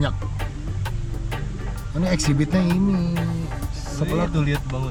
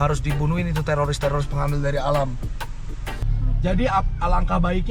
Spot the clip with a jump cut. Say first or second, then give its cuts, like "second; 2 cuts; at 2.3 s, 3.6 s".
second; 1 cut; at 3.3 s